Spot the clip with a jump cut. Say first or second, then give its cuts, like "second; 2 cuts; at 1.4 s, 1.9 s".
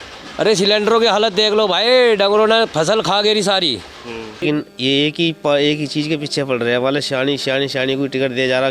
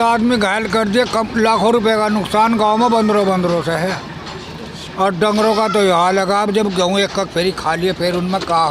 first; 1 cut; at 4.4 s